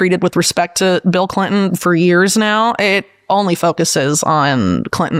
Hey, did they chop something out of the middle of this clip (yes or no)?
no